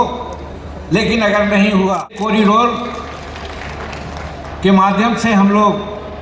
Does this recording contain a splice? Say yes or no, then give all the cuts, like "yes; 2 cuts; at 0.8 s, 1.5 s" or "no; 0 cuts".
yes; 1 cut; at 2.2 s